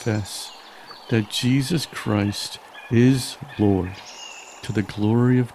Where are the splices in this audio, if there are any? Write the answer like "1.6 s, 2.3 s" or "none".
none